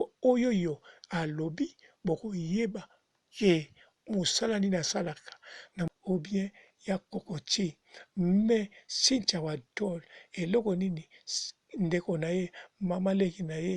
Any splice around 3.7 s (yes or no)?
no